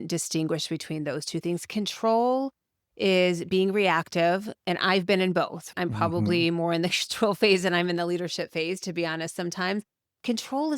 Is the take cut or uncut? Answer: cut